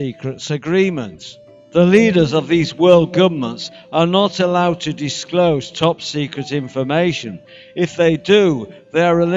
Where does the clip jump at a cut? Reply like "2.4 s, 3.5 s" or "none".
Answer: 1.3 s